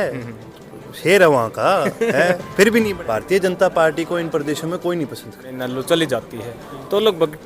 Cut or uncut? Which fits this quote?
cut